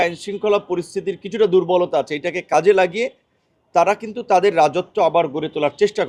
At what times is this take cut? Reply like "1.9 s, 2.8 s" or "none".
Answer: none